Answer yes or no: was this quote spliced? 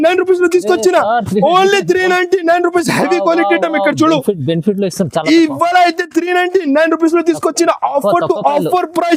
no